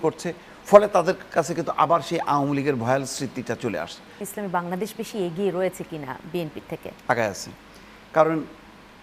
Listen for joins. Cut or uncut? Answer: cut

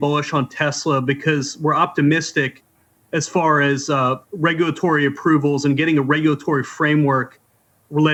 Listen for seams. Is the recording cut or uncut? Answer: uncut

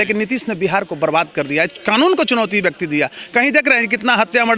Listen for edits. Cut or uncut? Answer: uncut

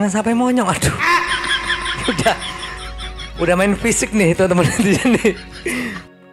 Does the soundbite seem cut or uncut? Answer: uncut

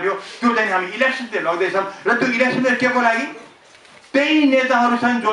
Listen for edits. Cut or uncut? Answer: uncut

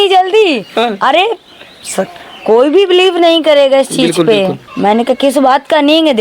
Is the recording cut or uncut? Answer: cut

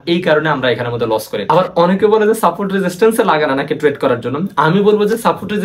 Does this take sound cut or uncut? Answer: cut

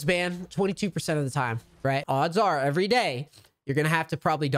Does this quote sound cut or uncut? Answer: cut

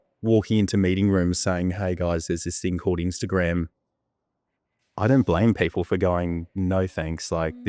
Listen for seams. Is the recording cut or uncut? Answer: uncut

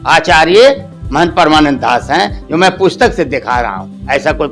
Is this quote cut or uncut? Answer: uncut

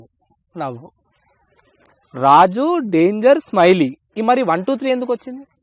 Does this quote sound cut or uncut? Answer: uncut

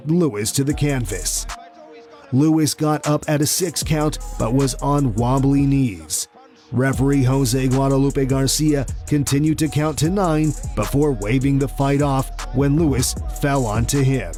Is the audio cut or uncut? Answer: uncut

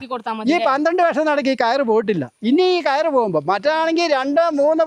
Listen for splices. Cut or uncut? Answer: uncut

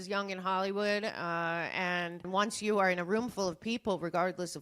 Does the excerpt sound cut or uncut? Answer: cut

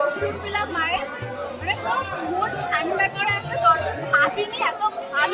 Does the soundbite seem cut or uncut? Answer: uncut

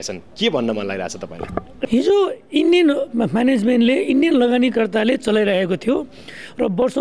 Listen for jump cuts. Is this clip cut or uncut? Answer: cut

